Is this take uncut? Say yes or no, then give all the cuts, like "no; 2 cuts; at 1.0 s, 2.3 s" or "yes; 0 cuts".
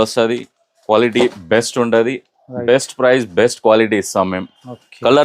yes; 0 cuts